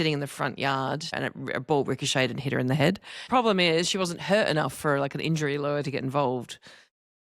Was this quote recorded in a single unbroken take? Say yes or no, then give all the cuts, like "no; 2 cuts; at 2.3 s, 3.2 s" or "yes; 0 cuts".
no; 2 cuts; at 1.2 s, 3.3 s